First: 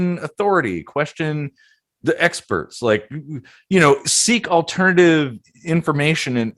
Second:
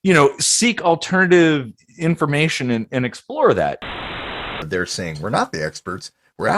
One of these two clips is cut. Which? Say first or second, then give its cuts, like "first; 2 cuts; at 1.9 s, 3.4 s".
second; 1 cut; at 4.3 s